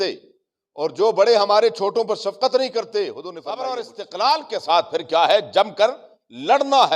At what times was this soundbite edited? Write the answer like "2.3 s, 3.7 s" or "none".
3.4 s